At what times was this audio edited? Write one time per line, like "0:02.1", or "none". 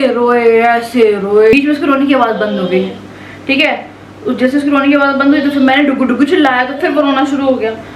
0:01.5